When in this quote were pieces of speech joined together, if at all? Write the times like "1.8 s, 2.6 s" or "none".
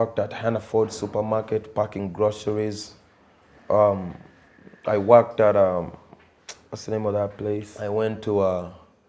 7.7 s